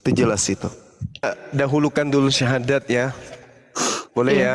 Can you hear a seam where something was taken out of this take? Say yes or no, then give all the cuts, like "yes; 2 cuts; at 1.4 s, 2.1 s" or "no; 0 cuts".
yes; 1 cut; at 1.3 s